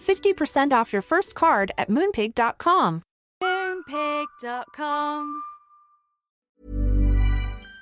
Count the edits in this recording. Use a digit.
1